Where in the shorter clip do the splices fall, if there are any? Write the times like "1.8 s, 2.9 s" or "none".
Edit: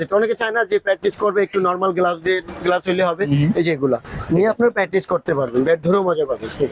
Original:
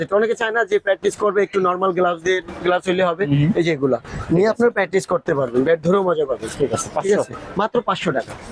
none